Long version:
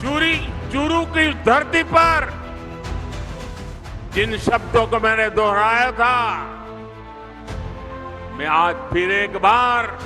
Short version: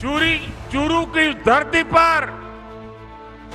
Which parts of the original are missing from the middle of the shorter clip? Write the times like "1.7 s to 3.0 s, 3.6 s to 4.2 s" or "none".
2.4 s to 6.4 s